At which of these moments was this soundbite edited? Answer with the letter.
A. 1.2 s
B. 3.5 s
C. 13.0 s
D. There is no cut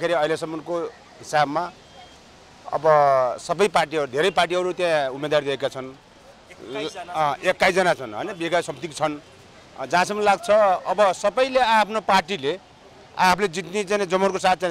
D